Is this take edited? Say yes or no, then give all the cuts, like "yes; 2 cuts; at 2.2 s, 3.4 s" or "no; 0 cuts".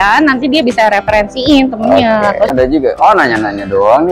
yes; 1 cut; at 2.5 s